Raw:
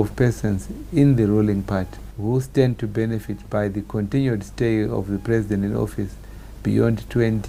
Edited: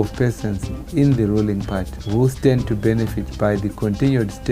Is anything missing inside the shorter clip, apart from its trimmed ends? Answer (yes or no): yes